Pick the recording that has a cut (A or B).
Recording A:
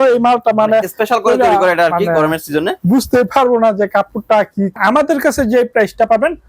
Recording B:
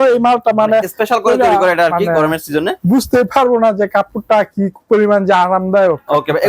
A